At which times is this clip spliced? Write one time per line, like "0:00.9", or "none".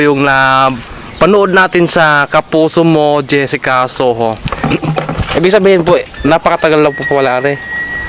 0:04.5